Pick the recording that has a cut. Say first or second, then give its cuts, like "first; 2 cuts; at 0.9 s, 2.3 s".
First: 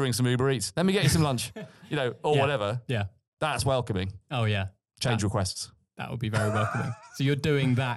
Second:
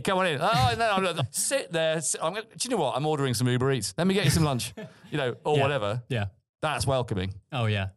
second; 1 cut; at 1.2 s